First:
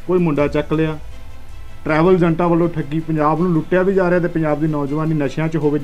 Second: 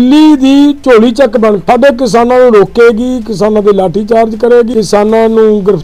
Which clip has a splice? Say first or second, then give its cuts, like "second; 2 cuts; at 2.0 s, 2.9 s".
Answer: second; 3 cuts; at 0.8 s, 1.6 s, 4.7 s